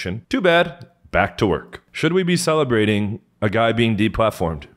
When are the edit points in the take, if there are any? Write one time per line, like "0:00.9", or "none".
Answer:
0:01.9